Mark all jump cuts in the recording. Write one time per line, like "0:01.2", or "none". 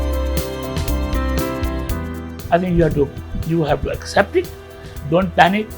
0:01.7